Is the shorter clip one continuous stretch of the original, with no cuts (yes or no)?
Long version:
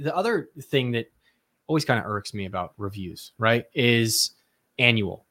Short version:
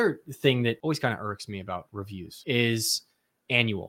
no